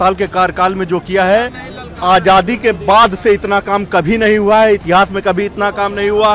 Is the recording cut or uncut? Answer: uncut